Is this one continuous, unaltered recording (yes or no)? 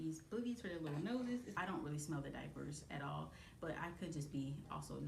no